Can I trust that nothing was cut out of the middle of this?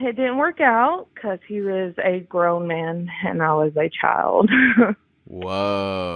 yes; 0 cuts

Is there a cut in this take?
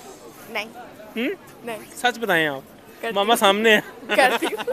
no; 0 cuts

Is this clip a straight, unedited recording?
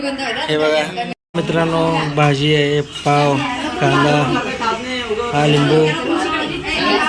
no; 1 cut; at 1.2 s

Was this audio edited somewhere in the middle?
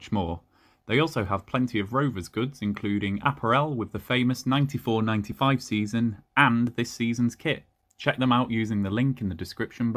no; 0 cuts

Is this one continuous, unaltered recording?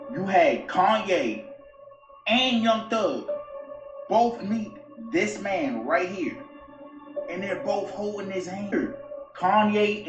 no; 1 cut; at 8.7 s

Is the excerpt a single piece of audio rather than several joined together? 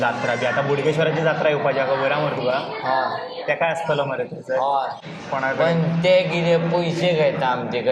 no; 1 cut; at 5.0 s

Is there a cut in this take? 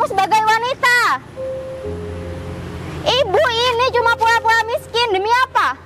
no; 0 cuts

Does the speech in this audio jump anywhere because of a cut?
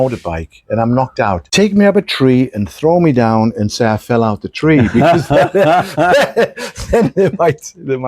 yes; 1 cut; at 1.5 s

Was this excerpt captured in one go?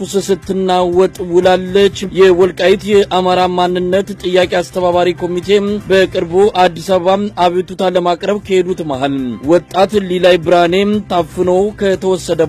no; 1 cut; at 5.8 s

